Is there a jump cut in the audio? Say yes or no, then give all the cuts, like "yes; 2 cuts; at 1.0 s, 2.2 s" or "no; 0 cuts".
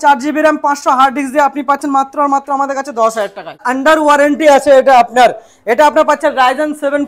yes; 1 cut; at 3.6 s